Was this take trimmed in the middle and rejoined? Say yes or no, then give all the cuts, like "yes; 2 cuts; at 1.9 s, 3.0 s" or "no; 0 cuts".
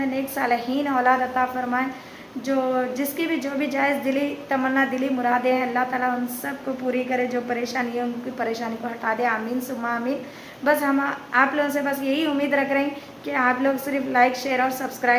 no; 0 cuts